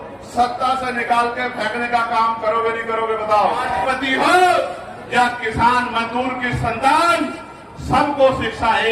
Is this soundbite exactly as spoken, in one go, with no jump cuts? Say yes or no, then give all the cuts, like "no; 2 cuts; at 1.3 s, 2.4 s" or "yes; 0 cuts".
no; 1 cut; at 3.8 s